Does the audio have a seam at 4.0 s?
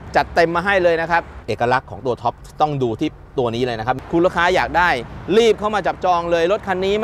yes; 2 cuts; at 1.4 s, 4.0 s

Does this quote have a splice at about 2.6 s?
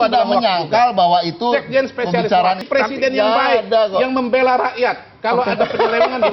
yes; 1 cut; at 2.6 s

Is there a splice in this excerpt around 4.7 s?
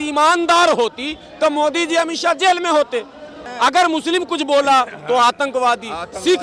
no; 1 cut; at 3.5 s

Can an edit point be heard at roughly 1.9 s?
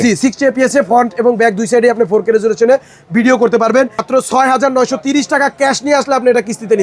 no; 1 cut; at 4.0 s

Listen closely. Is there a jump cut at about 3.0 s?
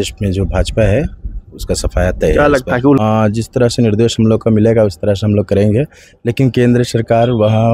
yes; 1 cut; at 3.0 s

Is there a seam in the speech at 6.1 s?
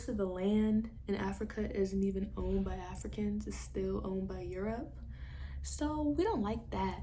no; 0 cuts

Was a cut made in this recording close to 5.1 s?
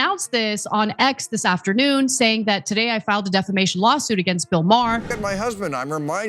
yes; 1 cut; at 5.1 s

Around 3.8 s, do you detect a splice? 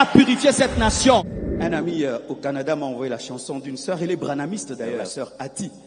no; 2 cuts; at 1.3 s, 5.1 s

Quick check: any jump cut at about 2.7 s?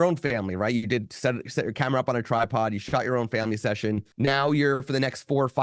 no; 1 cut; at 4.1 s

